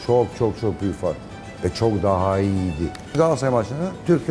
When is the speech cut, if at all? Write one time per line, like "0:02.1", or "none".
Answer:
0:03.1